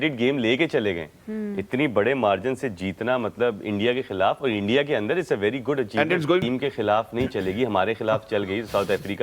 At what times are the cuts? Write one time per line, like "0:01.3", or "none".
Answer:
0:06.4